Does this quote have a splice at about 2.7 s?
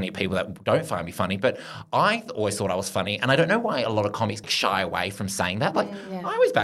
no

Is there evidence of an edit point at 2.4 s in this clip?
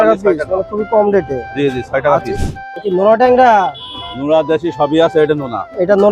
yes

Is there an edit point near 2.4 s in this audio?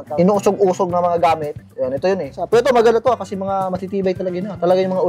yes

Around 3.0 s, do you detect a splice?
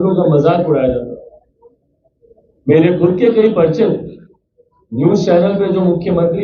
no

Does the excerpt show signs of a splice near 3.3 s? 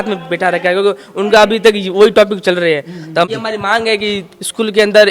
yes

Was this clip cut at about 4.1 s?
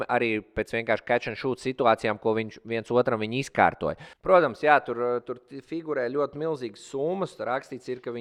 yes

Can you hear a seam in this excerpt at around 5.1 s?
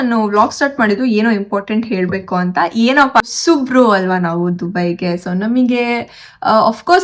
no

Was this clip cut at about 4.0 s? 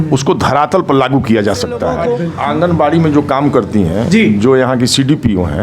no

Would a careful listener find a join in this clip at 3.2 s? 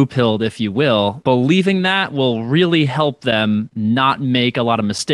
no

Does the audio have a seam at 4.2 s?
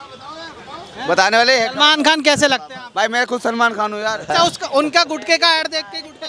yes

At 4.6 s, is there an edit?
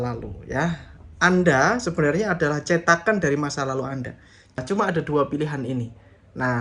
yes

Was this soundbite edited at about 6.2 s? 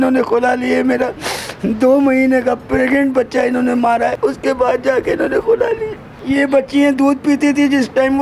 yes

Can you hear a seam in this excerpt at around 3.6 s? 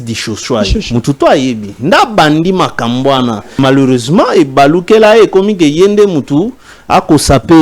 yes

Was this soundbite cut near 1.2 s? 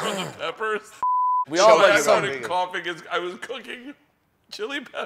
yes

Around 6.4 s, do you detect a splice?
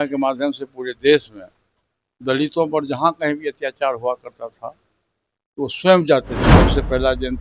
yes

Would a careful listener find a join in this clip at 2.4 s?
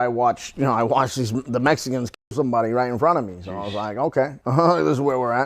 no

